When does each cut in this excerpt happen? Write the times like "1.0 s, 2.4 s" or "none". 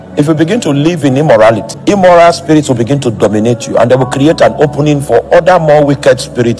1.7 s